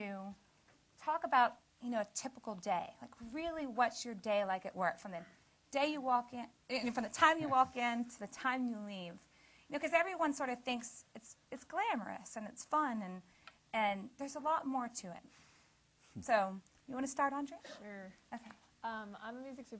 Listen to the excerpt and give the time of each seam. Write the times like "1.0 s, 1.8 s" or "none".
18.1 s